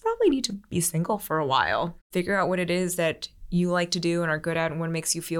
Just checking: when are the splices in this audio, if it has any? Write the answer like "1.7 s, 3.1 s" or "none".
2.0 s